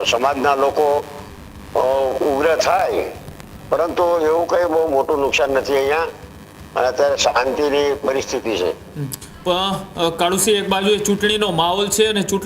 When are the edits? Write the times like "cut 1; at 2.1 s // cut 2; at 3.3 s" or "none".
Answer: none